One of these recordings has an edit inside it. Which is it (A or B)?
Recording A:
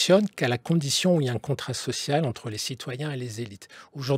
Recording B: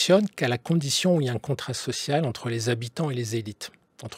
A